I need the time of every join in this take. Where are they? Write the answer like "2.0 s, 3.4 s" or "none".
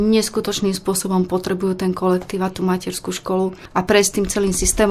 none